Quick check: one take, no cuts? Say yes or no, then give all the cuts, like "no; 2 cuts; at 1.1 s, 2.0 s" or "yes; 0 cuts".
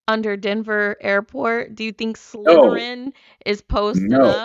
yes; 0 cuts